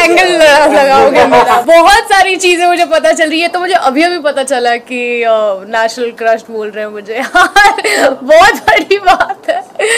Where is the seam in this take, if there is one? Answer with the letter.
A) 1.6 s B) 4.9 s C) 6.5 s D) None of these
A